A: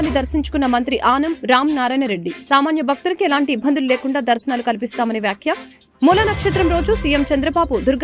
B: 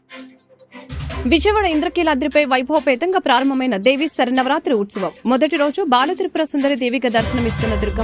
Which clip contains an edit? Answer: B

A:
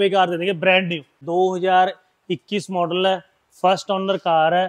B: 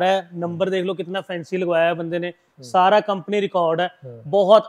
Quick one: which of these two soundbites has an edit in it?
A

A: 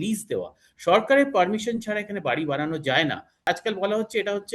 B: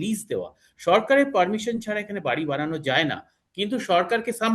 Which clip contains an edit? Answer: A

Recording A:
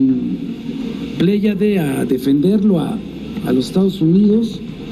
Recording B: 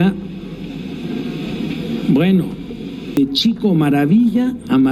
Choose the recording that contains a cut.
B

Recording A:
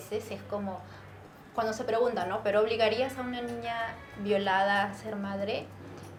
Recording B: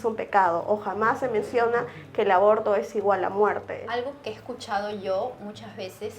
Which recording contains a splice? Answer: B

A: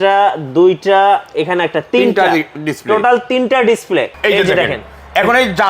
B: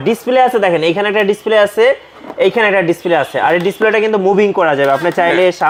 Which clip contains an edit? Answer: A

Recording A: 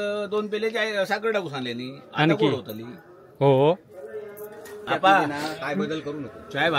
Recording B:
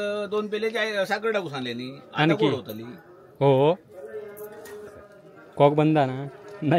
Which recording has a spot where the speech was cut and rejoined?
A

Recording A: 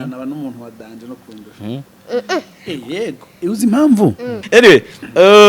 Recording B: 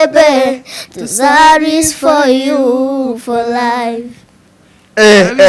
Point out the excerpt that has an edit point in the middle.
A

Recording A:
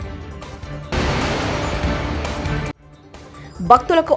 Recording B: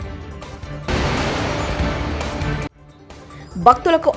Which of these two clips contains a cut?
A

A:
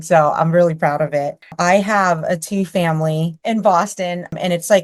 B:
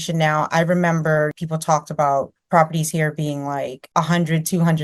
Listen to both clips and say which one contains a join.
A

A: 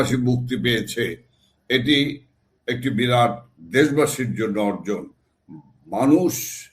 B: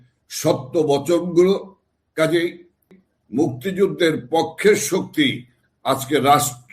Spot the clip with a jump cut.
B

